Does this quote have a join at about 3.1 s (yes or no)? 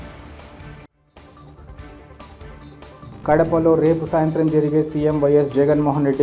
yes